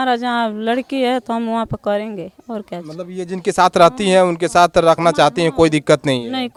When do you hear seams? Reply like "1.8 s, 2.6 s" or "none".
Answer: none